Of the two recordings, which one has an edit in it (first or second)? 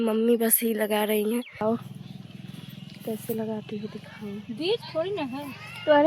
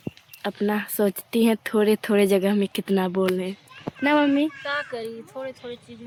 first